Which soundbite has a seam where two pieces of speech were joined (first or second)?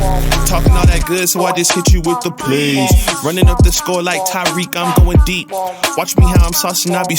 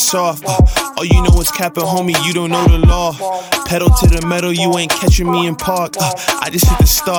first